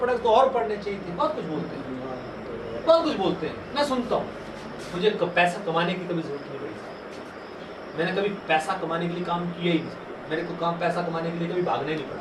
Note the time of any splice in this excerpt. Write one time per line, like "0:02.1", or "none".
0:04.9